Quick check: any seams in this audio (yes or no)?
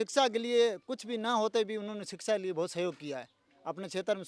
no